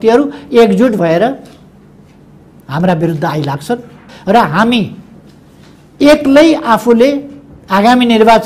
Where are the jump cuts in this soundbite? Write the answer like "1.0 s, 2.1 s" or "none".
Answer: 4.1 s